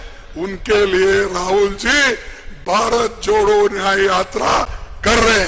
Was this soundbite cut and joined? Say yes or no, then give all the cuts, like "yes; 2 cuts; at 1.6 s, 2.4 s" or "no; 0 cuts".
no; 0 cuts